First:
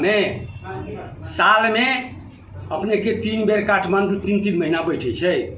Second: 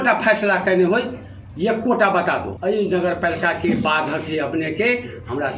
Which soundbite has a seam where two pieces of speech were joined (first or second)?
second